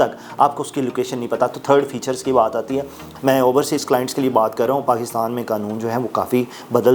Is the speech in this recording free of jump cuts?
no; 1 cut; at 3.1 s

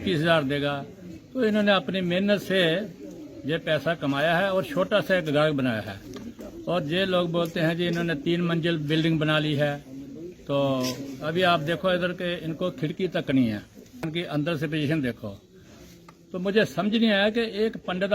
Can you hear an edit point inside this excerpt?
yes; 1 cut; at 14.1 s

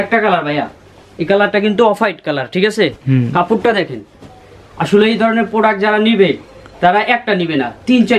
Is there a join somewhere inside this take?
no; 0 cuts

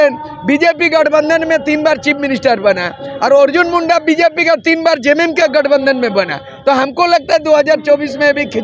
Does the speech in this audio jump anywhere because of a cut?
no; 0 cuts

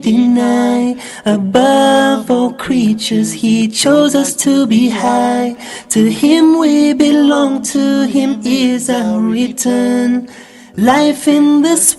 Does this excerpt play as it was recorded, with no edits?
no; 1 cut; at 5.1 s

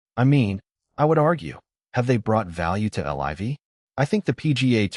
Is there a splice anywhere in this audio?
yes; 1 cut; at 3.8 s

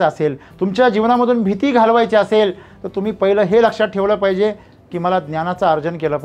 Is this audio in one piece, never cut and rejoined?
yes; 0 cuts

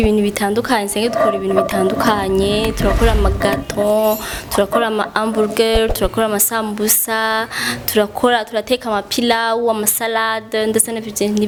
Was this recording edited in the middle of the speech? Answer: no; 0 cuts

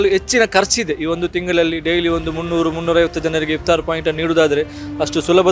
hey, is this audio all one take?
yes; 0 cuts

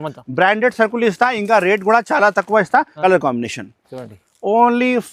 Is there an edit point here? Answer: yes; 1 cut; at 2.9 s

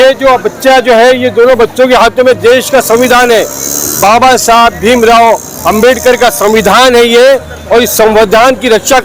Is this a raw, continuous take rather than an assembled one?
yes; 0 cuts

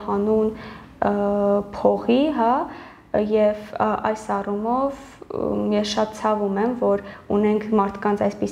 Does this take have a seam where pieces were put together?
no; 0 cuts

